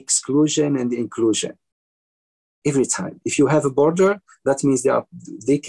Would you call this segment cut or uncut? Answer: uncut